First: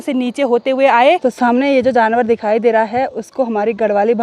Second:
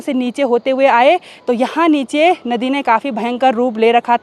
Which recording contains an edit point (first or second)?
first